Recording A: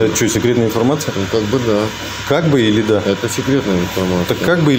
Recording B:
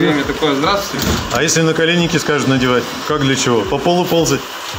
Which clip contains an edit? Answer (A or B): B